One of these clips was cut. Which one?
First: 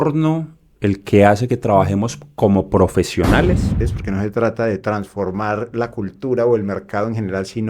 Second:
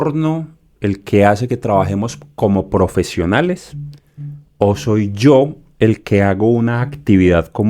first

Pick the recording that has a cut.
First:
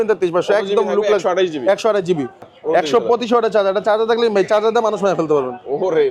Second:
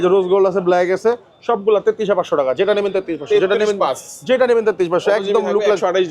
first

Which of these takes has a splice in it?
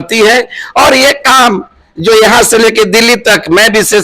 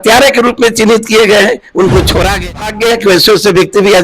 second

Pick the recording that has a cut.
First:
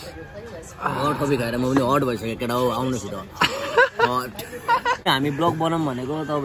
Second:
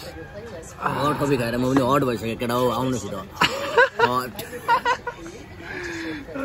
first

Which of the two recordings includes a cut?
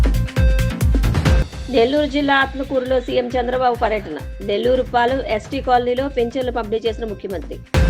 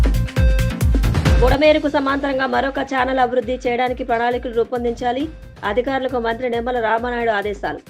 first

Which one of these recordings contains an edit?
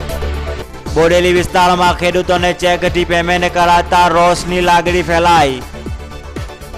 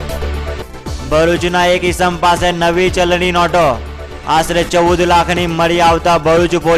first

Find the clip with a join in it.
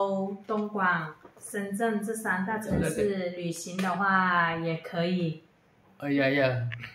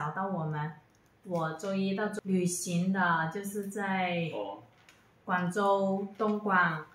second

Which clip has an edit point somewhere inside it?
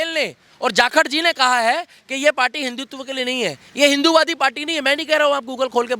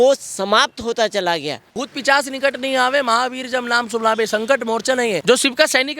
second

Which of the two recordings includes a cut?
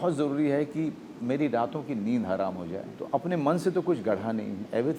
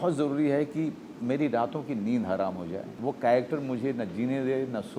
first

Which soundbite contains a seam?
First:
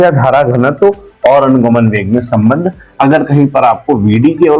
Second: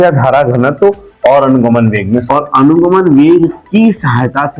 second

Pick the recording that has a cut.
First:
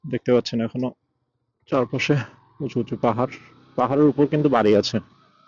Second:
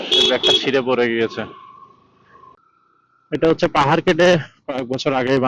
second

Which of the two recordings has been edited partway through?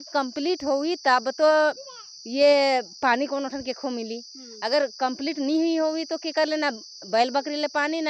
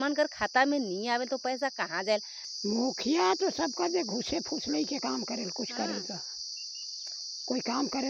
second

